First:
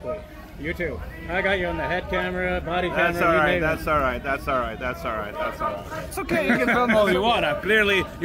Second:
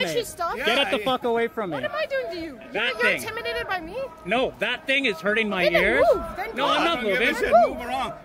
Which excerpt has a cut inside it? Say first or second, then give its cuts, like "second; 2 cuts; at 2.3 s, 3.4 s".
first; 1 cut; at 6.1 s